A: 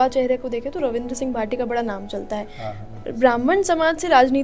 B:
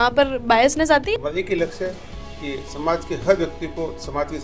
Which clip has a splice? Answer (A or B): B